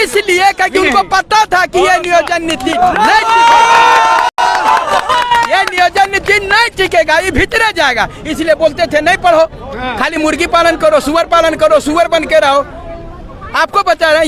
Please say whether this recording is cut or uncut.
uncut